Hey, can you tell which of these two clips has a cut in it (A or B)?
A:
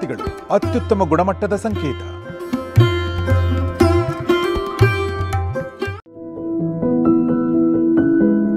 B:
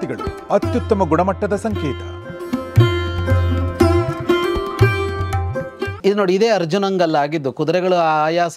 B